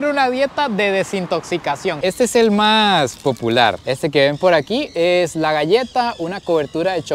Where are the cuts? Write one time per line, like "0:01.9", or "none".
0:02.0